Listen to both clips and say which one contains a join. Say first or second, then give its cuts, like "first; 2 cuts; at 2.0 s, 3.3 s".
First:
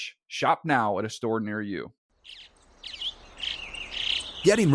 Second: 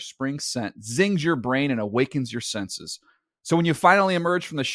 first; 1 cut; at 1.9 s